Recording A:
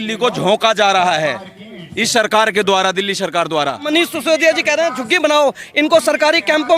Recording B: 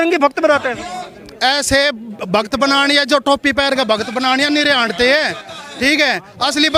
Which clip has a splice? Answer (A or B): A